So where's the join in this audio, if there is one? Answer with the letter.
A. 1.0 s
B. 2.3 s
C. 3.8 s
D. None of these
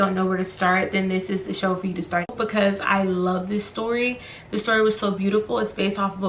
B